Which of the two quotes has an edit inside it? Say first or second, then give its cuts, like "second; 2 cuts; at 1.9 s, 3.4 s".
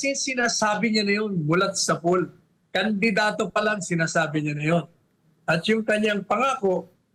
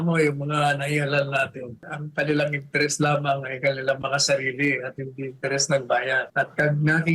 second; 2 cuts; at 2.0 s, 6.3 s